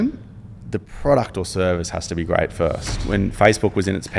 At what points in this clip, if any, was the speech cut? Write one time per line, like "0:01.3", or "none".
0:02.9